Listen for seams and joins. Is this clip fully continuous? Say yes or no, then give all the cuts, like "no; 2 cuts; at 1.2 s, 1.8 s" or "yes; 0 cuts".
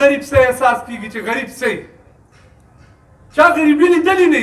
yes; 0 cuts